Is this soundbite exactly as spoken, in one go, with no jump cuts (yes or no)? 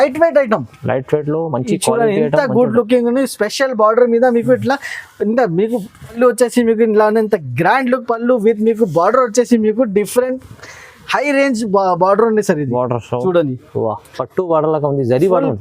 no